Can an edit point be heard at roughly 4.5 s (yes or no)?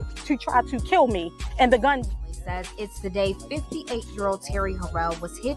no